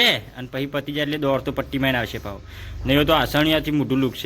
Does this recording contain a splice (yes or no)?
yes